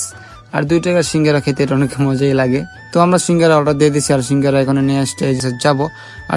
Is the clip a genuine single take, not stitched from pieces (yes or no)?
no